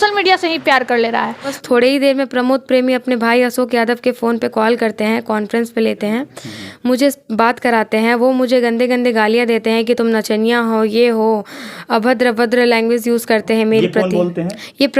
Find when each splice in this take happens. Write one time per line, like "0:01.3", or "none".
0:01.6